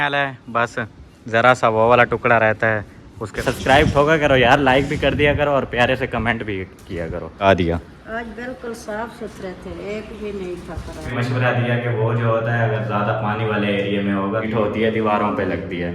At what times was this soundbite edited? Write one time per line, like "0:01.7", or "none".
0:03.4
0:07.4
0:11.1
0:14.5